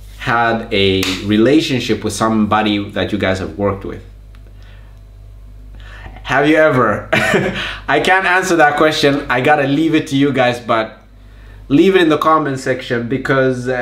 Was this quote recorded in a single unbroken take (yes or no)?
yes